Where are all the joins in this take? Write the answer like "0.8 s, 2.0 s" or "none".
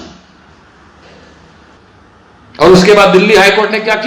1.8 s